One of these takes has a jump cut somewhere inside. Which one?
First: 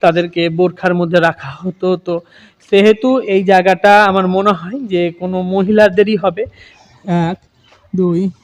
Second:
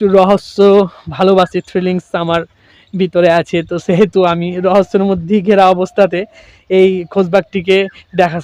first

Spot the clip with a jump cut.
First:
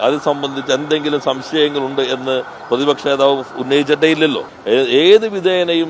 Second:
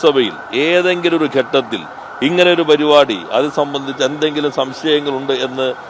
first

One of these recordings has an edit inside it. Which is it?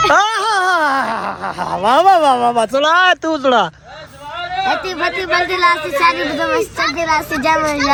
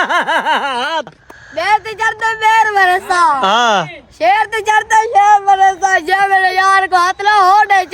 second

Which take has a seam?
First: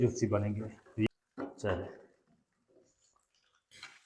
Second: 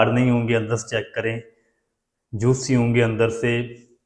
first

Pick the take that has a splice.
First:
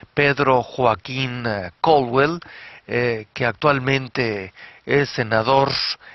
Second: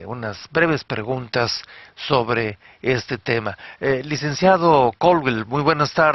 second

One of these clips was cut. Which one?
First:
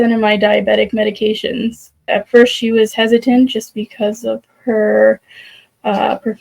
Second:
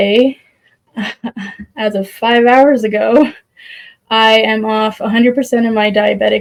first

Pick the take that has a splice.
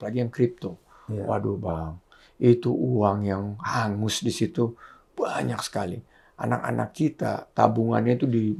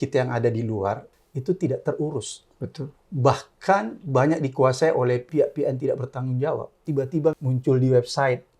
second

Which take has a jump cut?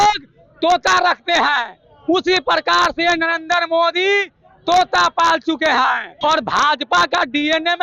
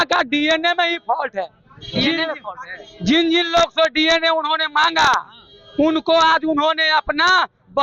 first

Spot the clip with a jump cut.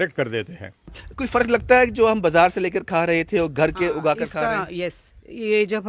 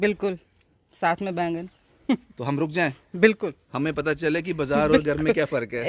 first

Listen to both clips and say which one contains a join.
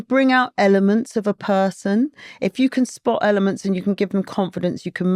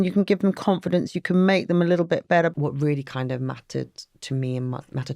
second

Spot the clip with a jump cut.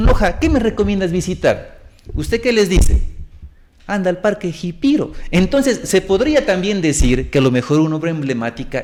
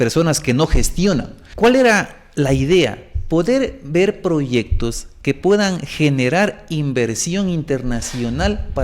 second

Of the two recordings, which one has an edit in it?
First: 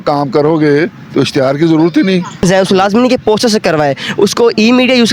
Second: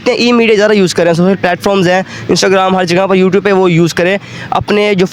first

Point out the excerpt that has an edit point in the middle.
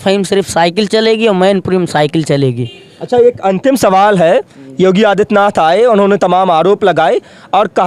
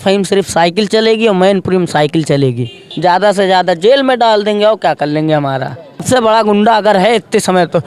second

